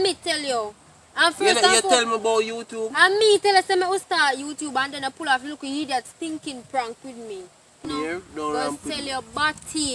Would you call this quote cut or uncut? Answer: cut